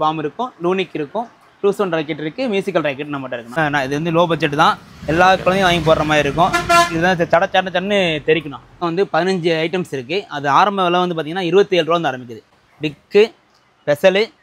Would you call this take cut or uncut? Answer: cut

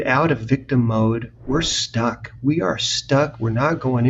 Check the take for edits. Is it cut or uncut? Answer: uncut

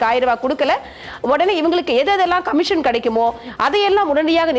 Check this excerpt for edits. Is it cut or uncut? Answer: uncut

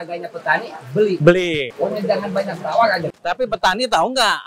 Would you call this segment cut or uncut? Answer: uncut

